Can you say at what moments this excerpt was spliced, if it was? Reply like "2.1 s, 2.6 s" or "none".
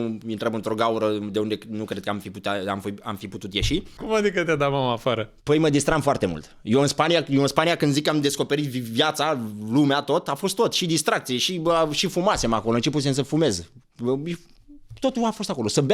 3.9 s